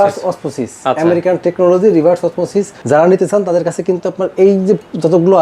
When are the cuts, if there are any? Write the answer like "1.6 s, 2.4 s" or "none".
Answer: 2.8 s